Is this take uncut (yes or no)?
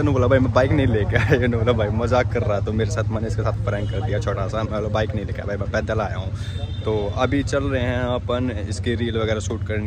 yes